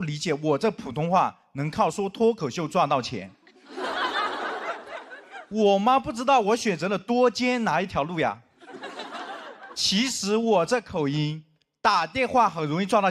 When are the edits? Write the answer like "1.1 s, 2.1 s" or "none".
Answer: none